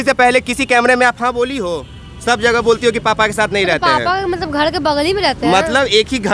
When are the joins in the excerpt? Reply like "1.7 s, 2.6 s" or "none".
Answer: none